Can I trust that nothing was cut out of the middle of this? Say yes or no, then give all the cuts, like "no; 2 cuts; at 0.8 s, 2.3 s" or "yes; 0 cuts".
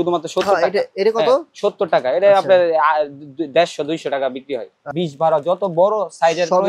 no; 1 cut; at 4.8 s